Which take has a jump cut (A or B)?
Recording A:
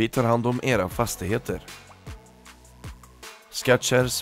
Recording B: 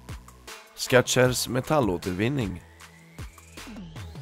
B